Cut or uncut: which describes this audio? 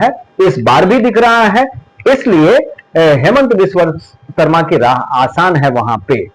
uncut